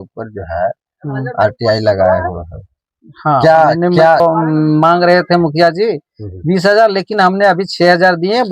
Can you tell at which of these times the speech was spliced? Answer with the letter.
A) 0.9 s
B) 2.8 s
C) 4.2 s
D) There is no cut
C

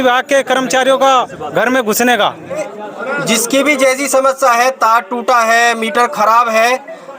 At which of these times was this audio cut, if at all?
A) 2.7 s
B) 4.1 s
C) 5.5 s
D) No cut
A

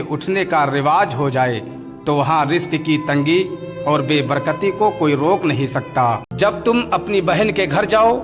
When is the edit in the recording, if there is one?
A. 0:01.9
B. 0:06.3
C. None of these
B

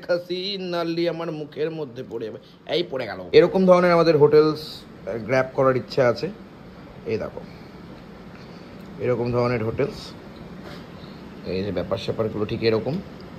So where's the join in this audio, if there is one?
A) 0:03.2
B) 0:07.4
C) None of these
A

